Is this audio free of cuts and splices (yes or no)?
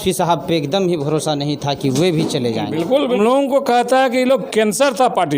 no